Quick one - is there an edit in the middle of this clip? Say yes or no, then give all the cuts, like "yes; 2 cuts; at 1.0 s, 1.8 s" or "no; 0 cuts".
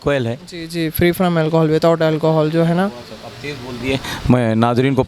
no; 0 cuts